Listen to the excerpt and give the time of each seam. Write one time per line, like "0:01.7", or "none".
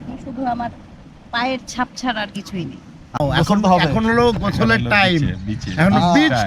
0:03.2